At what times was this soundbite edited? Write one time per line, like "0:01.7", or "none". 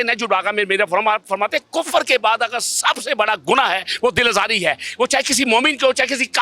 none